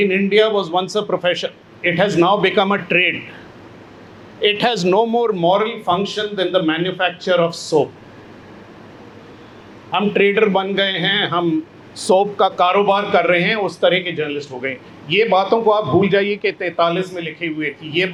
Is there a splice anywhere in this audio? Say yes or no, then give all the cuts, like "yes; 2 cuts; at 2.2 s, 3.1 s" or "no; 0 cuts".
no; 0 cuts